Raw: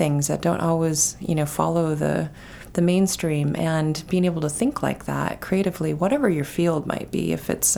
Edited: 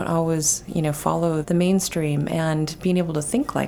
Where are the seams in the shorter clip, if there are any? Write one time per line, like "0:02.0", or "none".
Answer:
0:01.4